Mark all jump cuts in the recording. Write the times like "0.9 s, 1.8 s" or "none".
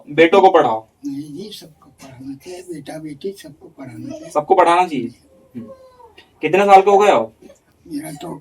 none